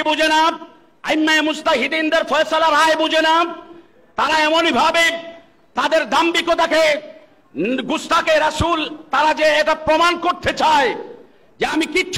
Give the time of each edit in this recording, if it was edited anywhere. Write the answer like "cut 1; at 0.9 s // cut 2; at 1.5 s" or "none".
none

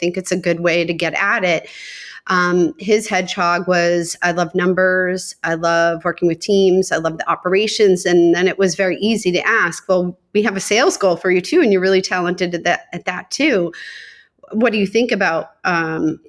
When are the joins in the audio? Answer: none

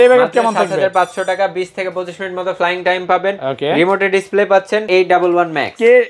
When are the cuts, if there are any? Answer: cut 1; at 4.9 s

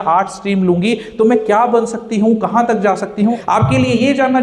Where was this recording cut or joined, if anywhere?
cut 1; at 3.4 s

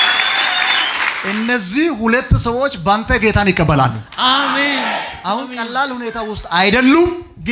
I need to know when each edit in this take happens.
cut 1; at 1.2 s // cut 2; at 5.1 s

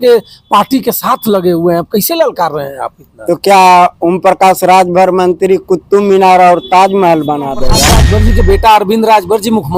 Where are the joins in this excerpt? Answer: cut 1; at 8.0 s

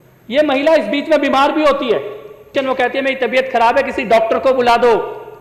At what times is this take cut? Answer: cut 1; at 2.4 s

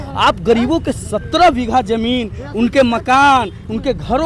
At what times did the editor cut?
none

